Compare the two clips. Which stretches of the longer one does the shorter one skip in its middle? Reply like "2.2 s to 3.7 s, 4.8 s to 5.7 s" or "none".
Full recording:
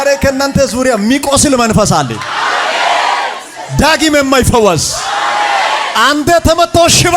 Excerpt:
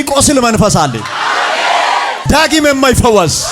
3.3 s to 3.7 s